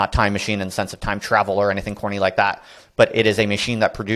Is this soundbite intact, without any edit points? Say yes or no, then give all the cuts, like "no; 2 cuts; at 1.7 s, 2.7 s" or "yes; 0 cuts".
yes; 0 cuts